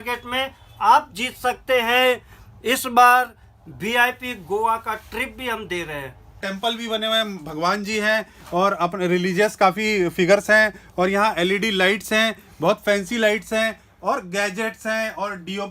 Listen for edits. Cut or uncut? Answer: cut